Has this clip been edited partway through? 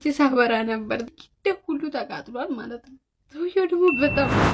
yes; 1 cut; at 1.0 s

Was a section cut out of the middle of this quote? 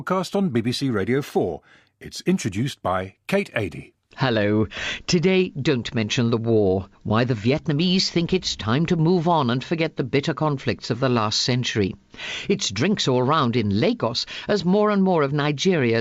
no; 0 cuts

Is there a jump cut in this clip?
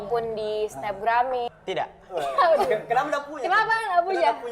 yes; 1 cut; at 1.5 s

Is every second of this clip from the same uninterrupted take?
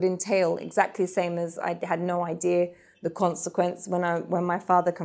yes; 0 cuts

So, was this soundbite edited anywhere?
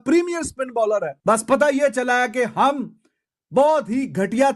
yes; 1 cut; at 1.1 s

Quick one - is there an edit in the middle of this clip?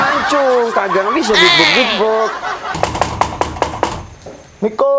yes; 1 cut; at 2.8 s

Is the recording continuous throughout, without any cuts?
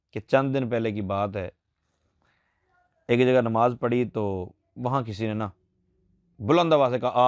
yes; 0 cuts

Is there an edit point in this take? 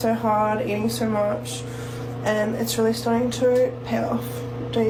no; 0 cuts

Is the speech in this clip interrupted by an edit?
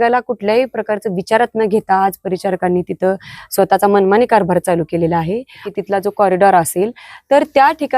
yes; 1 cut; at 5.6 s

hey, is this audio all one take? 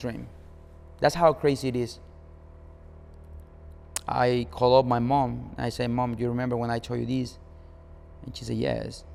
yes; 0 cuts

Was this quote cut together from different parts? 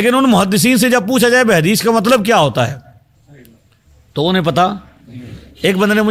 no; 0 cuts

